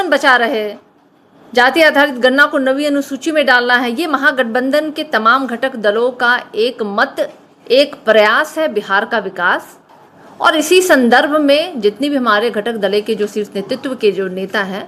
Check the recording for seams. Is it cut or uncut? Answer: uncut